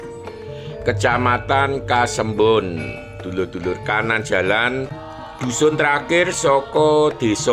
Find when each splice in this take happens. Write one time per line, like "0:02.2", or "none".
0:04.9